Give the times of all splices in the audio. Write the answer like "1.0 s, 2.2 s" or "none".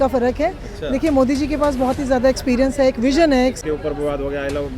3.6 s

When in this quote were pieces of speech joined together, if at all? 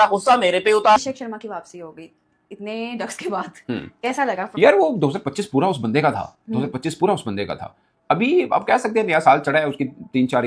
1.0 s

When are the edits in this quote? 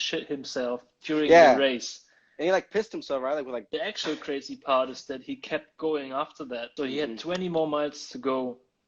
3.7 s, 6.7 s

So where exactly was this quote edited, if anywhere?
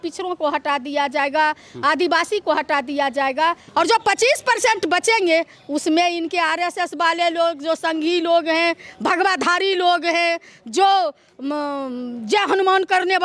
3.6 s

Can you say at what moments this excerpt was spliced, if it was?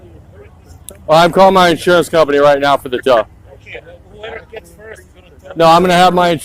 none

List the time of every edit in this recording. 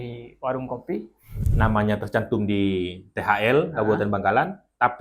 1.5 s

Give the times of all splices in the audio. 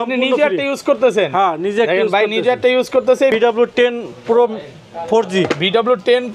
3.3 s

